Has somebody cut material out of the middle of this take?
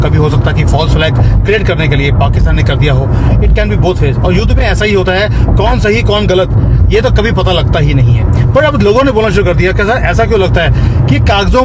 no; 0 cuts

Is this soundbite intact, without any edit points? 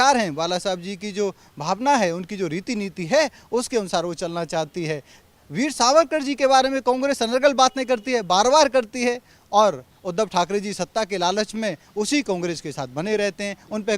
yes; 0 cuts

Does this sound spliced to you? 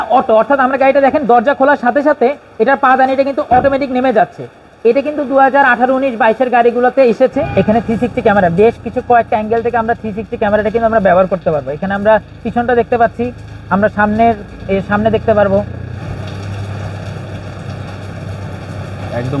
yes; 2 cuts; at 7.4 s, 15.8 s

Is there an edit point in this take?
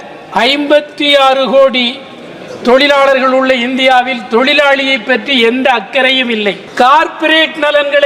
yes; 1 cut; at 6.6 s

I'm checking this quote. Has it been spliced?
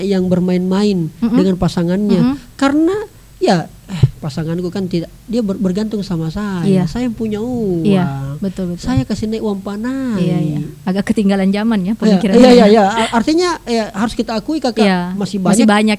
no; 0 cuts

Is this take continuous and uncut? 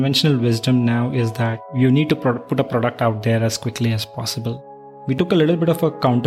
no; 2 cuts; at 1.7 s, 5.1 s

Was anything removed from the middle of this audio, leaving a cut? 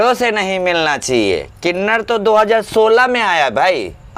no; 0 cuts

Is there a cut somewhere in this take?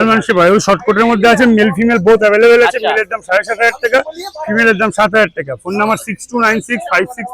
no; 0 cuts

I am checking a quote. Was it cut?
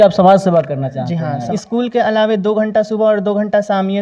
yes; 1 cut; at 1.5 s

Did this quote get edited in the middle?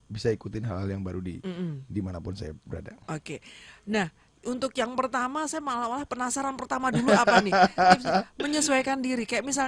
no; 0 cuts

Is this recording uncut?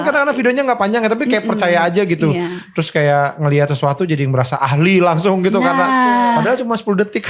yes; 0 cuts

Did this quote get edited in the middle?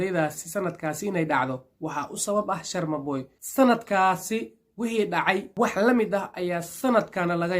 yes; 2 cuts; at 3.4 s, 5.5 s

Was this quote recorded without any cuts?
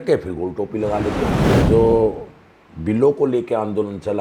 no; 1 cut; at 1.5 s

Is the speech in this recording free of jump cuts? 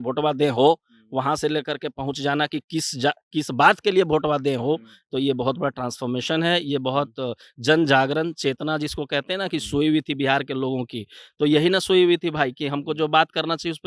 yes; 0 cuts

